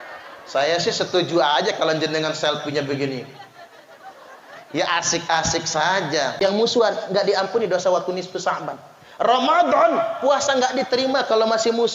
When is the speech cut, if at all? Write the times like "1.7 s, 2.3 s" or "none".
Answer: 6.4 s